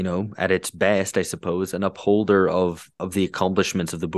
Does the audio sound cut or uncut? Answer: cut